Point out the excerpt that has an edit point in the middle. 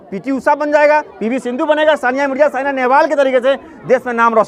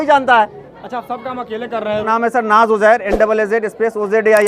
second; 1 cut; at 2.1 s

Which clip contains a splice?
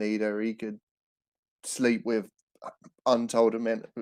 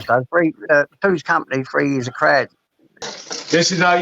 second; 1 cut; at 3.1 s

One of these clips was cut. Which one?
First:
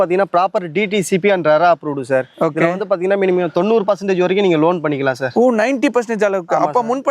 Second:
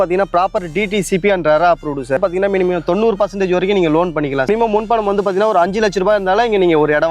second; 2 cuts; at 2.2 s, 4.5 s

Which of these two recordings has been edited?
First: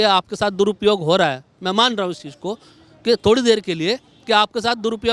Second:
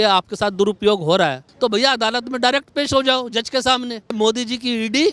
second; 2 cuts; at 1.4 s, 4.1 s

